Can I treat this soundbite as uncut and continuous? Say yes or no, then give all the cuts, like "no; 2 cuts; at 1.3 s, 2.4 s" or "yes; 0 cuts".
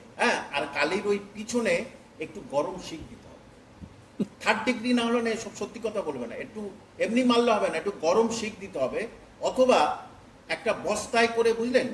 yes; 0 cuts